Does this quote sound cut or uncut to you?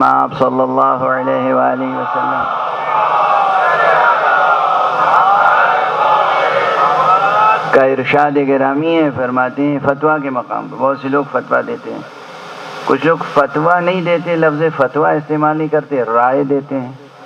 uncut